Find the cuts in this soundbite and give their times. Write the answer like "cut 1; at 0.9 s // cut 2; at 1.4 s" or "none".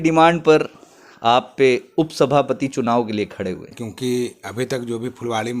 cut 1; at 3.8 s